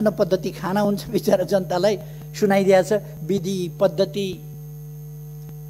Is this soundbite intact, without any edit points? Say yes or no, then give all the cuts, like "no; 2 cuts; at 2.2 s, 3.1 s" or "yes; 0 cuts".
yes; 0 cuts